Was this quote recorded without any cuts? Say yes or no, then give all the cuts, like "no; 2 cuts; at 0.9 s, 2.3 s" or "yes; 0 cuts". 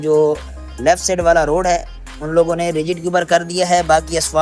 yes; 0 cuts